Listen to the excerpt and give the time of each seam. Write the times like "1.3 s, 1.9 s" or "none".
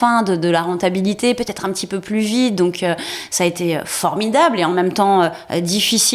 none